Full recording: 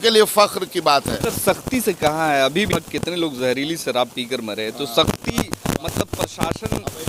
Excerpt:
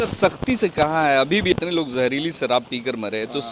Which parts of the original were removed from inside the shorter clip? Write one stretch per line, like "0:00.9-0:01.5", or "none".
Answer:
0:02.7-0:03.0